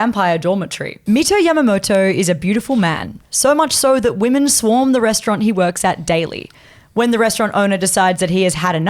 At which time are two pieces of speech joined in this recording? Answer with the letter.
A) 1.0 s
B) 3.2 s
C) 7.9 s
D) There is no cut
A